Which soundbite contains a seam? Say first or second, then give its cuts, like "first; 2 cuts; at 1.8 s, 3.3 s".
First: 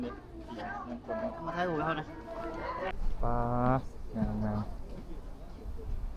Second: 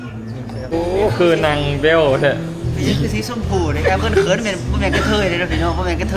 first; 1 cut; at 2.9 s